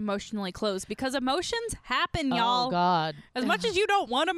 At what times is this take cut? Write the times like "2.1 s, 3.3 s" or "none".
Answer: none

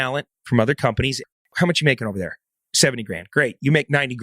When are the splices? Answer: 1.4 s

